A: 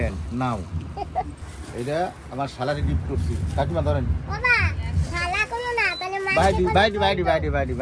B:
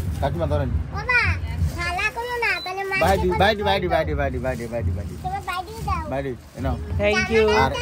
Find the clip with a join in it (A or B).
A